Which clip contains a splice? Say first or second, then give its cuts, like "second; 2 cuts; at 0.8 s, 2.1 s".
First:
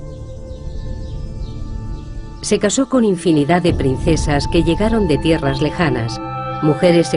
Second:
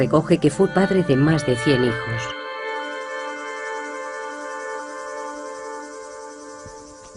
first; 1 cut; at 5.9 s